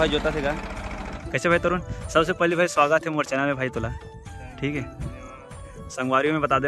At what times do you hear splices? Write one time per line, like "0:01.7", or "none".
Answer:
0:01.1